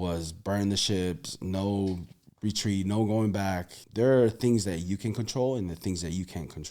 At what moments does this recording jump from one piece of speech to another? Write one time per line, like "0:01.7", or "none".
0:03.8

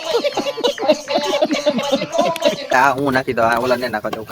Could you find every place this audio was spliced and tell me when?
0:02.7

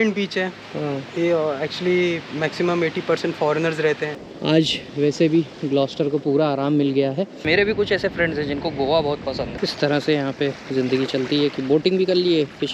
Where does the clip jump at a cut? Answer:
0:04.1
0:07.4
0:09.5

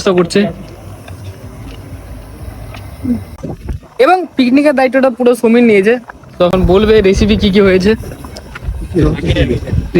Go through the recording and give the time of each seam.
0:03.3

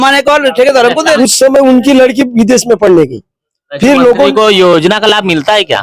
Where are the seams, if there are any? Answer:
0:01.2

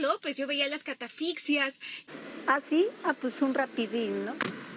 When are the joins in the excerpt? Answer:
0:02.0

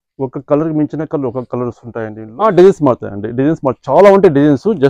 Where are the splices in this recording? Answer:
0:02.2

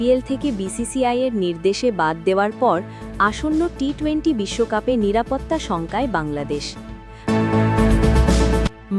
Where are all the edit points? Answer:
0:07.1

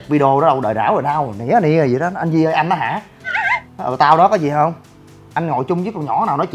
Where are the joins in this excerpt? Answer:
none

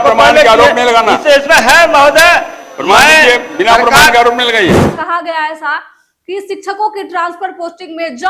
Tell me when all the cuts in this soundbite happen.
0:05.0

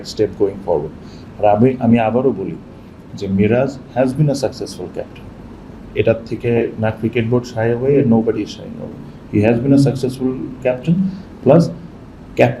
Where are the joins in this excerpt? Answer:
none

